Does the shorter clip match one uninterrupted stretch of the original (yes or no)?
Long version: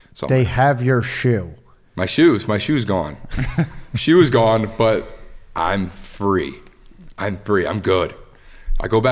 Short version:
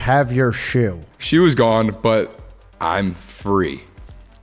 no